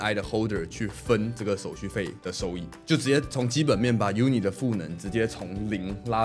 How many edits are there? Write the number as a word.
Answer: zero